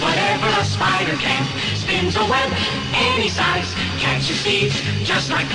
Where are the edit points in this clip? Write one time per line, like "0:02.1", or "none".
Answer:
none